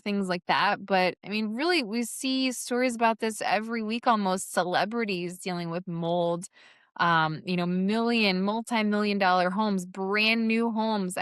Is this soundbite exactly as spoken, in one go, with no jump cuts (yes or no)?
yes